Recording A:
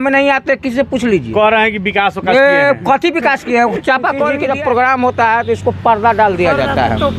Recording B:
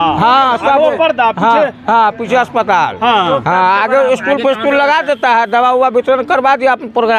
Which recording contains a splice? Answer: A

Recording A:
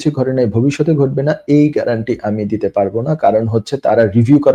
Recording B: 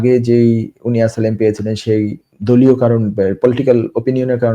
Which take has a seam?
B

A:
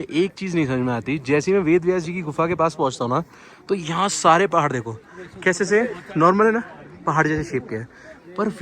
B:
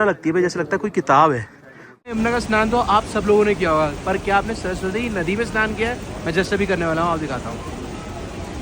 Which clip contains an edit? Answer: B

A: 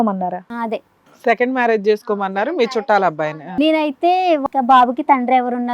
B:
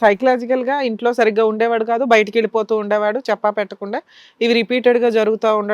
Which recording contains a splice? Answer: A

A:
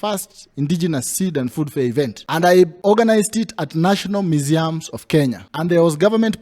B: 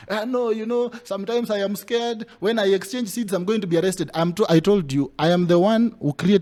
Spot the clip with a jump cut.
A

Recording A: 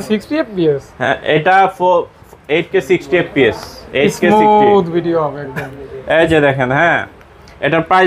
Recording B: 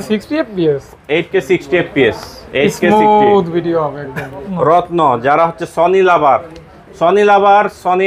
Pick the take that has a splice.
B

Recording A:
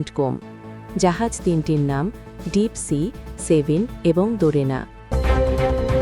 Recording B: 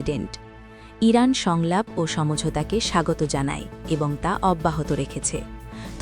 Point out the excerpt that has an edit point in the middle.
A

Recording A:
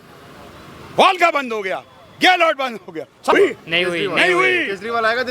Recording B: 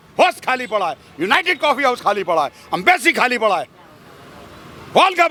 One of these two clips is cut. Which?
A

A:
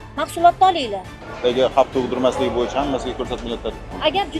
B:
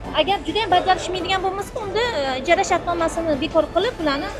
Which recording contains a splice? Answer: A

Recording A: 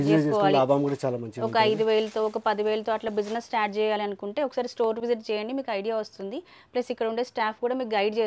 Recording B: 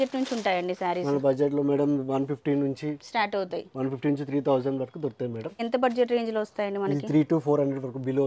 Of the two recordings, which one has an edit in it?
B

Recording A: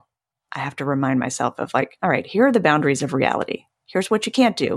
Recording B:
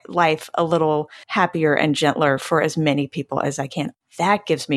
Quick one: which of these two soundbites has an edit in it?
B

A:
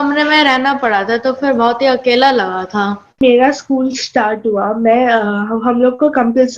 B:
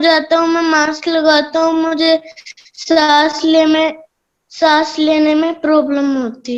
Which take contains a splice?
A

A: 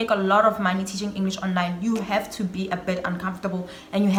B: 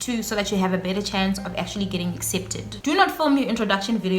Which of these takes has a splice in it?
B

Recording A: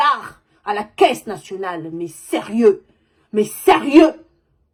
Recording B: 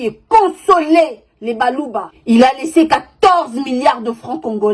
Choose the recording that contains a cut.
B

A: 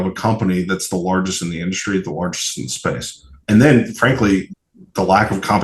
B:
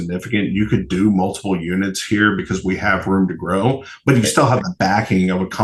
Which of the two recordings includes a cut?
A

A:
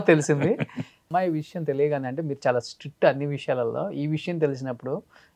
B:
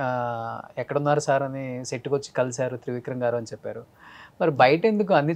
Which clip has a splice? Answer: A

